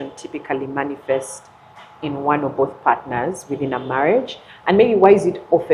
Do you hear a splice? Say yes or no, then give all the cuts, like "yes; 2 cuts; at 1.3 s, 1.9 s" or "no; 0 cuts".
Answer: no; 0 cuts